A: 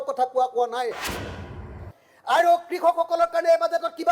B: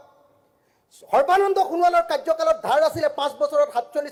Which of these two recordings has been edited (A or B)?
A